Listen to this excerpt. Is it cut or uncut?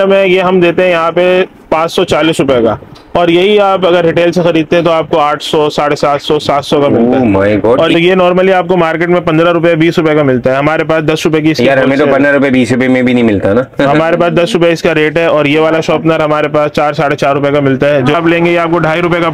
cut